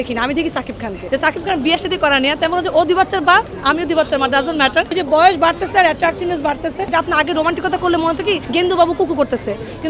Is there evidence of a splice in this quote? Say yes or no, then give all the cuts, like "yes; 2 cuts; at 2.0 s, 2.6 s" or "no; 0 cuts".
yes; 4 cuts; at 1.0 s, 4.9 s, 6.9 s, 8.4 s